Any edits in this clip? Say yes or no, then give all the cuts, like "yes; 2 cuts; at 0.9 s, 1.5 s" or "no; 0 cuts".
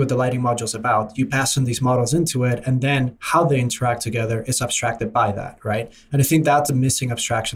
no; 0 cuts